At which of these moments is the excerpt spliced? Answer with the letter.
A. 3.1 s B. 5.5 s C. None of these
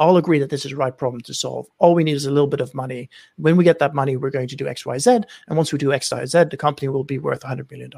C